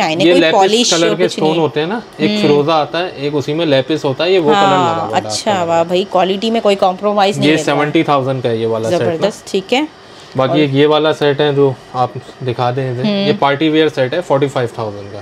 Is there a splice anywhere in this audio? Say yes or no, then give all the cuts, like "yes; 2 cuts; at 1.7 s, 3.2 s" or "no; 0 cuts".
no; 0 cuts